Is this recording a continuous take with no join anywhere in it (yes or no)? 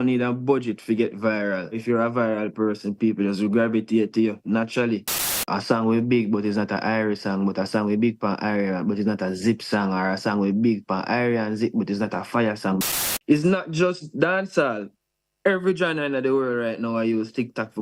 no